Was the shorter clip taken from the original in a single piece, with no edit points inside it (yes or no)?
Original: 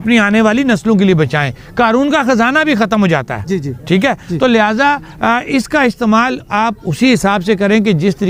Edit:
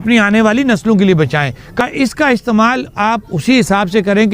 no